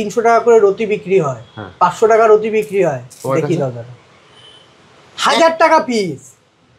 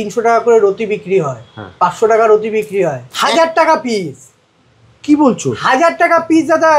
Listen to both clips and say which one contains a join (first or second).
second